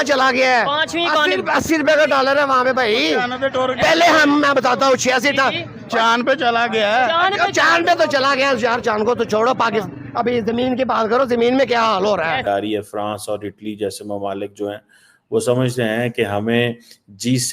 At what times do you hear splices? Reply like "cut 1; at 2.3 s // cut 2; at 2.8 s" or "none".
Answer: cut 1; at 12.4 s